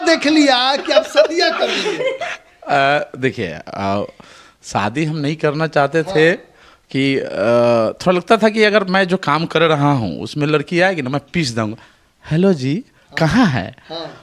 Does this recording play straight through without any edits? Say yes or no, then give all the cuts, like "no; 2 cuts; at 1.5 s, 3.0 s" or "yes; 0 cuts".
yes; 0 cuts